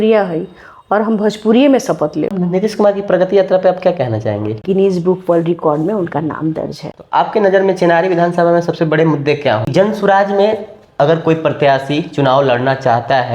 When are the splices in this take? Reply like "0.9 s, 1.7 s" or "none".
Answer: 2.3 s, 4.6 s, 6.9 s, 9.7 s